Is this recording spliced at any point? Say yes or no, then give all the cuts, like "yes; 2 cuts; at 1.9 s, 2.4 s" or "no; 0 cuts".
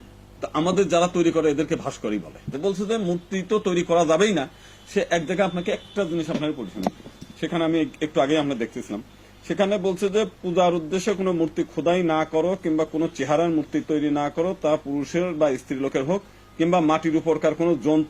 yes; 1 cut; at 2.5 s